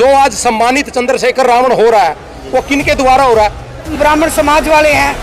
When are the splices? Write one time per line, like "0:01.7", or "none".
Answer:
0:03.9